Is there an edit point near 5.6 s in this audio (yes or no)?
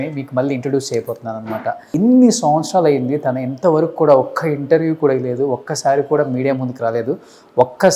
no